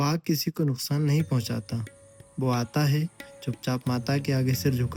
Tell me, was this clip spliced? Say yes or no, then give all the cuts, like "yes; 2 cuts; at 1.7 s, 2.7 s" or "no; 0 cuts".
no; 0 cuts